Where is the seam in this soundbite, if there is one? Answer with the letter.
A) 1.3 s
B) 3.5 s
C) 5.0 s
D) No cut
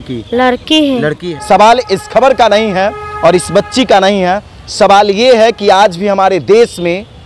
A